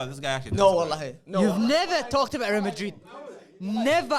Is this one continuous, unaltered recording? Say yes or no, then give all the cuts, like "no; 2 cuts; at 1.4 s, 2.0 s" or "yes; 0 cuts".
yes; 0 cuts